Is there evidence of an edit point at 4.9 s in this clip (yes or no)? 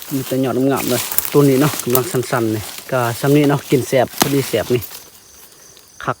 no